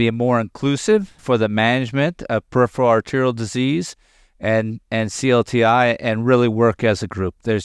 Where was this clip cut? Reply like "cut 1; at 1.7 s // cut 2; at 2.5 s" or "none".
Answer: cut 1; at 1.2 s